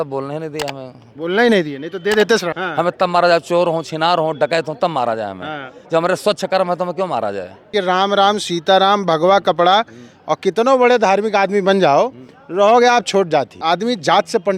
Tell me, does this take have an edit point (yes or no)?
yes